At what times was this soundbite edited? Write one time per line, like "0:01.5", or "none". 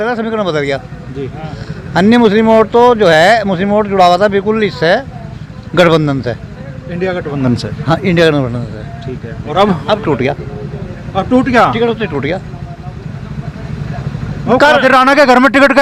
none